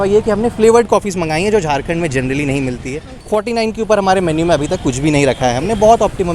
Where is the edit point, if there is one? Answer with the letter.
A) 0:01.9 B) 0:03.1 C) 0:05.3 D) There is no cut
B